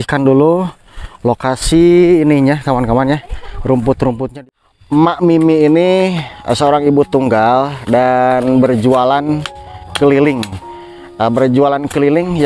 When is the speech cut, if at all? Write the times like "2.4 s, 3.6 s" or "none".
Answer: 4.3 s